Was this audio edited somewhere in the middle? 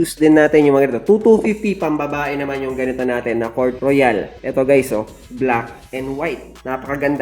no; 0 cuts

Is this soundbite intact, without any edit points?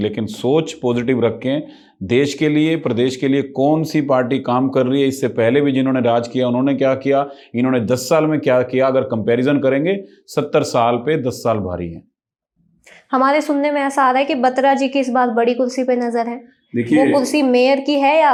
yes; 0 cuts

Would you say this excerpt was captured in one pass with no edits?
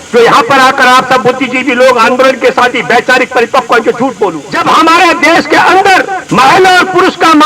no; 2 cuts; at 4.5 s, 6.2 s

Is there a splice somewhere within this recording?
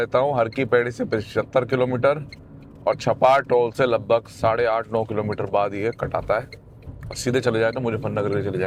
no; 0 cuts

